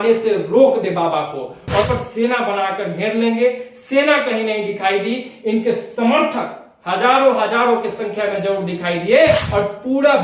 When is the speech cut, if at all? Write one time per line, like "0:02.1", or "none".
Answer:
0:01.9
0:09.4